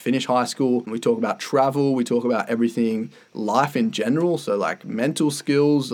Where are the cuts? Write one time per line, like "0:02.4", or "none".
0:00.9